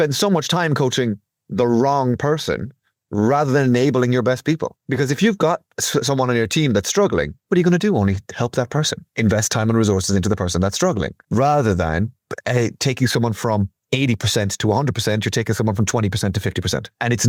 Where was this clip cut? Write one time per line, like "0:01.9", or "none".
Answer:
none